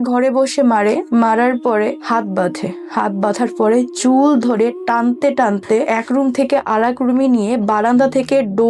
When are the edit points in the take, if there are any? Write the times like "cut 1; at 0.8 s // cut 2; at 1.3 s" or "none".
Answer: cut 1; at 1.0 s // cut 2; at 2.0 s // cut 3; at 5.9 s